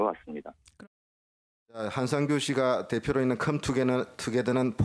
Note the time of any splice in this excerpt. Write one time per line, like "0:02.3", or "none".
0:02.3